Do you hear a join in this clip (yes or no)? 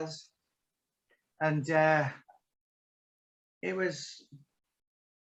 no